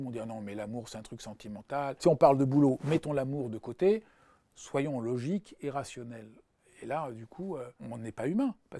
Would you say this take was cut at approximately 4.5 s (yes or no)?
no